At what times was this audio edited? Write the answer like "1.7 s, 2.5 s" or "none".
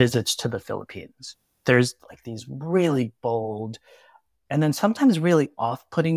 1.5 s